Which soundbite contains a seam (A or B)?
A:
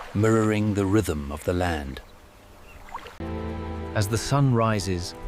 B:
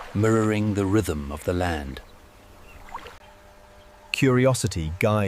B